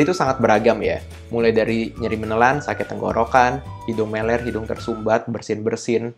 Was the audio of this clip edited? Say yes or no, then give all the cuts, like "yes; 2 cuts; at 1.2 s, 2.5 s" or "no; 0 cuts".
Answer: no; 0 cuts